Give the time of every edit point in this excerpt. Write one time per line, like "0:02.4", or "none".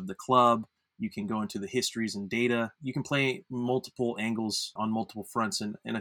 0:02.8
0:04.7